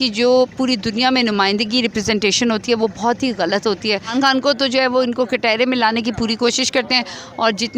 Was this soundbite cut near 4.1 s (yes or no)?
yes